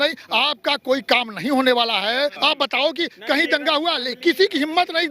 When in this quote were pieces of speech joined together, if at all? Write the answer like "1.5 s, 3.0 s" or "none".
2.4 s